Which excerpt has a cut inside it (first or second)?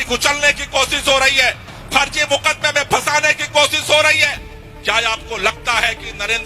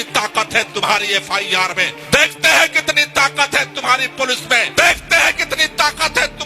second